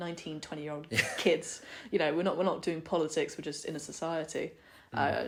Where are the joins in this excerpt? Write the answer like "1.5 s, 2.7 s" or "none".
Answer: none